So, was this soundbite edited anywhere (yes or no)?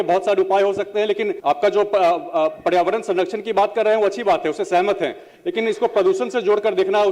yes